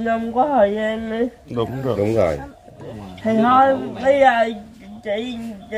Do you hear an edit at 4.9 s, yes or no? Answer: no